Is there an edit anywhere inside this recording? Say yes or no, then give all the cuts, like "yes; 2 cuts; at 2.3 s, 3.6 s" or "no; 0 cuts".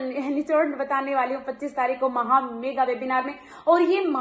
no; 0 cuts